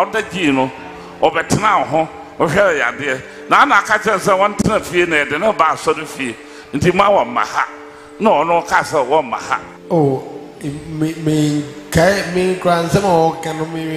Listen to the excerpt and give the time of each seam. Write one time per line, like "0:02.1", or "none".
0:09.7

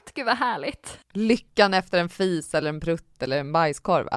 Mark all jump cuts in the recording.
0:01.0

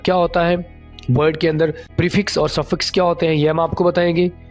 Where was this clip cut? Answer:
0:01.8

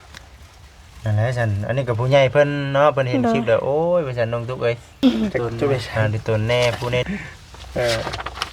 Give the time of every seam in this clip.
0:07.0

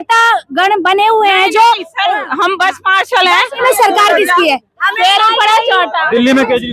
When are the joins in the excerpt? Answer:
0:03.6

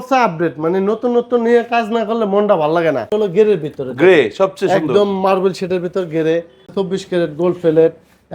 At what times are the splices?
0:03.1
0:06.7

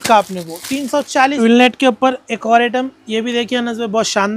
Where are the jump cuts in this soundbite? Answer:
0:01.4

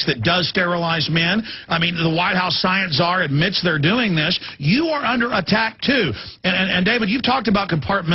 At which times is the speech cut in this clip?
0:05.5

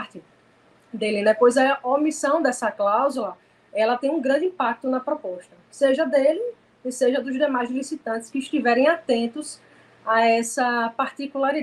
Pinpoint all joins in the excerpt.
none

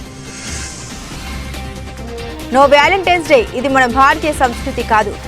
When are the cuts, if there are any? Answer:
0:00.8
0:02.5

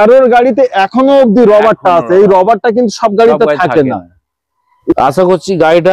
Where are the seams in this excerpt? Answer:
0:04.9

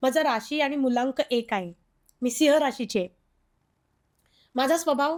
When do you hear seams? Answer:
none

